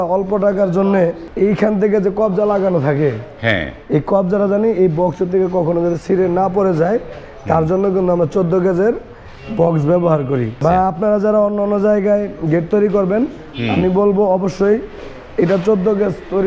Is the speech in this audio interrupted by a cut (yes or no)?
yes